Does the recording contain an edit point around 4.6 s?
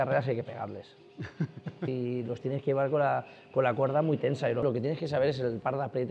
yes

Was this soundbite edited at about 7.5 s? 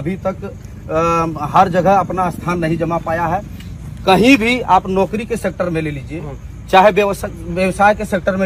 no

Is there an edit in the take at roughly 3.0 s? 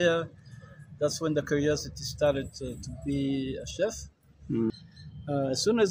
no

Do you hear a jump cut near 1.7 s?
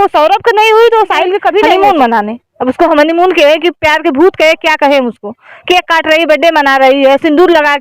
yes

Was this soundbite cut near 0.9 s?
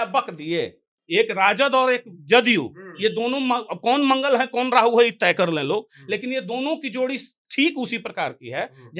yes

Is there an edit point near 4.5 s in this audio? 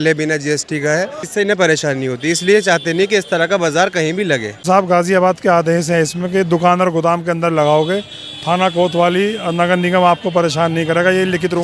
yes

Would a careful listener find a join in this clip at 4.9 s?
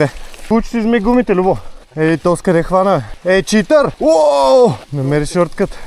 yes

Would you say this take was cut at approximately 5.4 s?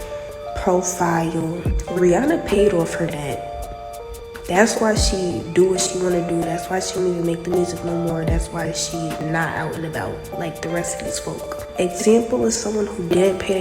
no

